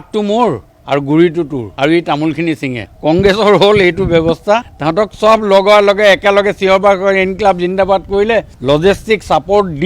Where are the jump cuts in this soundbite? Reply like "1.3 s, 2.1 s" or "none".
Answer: 1.6 s, 4.8 s, 8.5 s